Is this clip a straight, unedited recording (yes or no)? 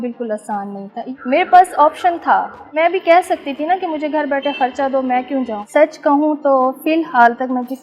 no